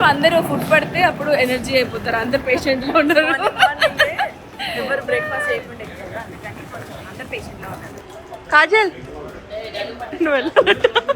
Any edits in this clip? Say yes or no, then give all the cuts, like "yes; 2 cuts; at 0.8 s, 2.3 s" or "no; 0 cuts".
yes; 1 cut; at 8.0 s